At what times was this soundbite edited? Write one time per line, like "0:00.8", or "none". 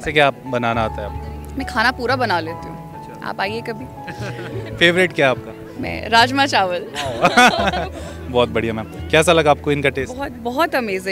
none